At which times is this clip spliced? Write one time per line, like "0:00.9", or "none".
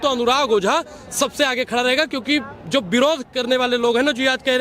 none